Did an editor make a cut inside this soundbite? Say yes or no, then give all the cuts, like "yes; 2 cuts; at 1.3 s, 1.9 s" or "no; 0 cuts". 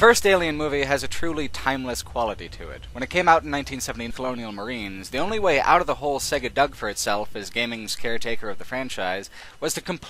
no; 0 cuts